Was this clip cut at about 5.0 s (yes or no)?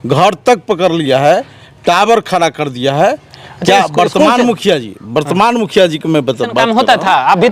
no